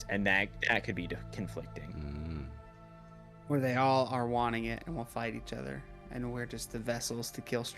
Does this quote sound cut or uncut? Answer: uncut